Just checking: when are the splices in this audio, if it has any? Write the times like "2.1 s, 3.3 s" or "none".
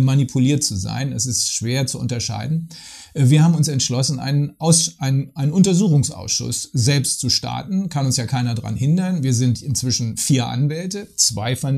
none